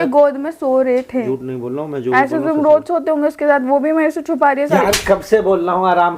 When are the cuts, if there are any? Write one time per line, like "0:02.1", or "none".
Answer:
0:01.1